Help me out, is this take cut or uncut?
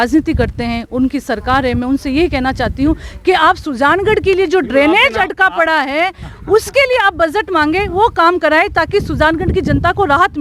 uncut